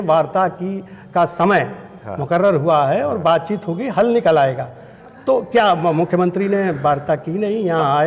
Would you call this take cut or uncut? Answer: uncut